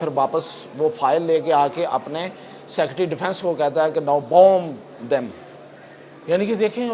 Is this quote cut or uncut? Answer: uncut